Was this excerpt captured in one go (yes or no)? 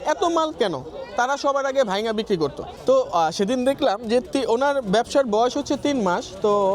yes